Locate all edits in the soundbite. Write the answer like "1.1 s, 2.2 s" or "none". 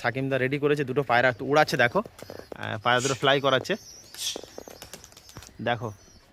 none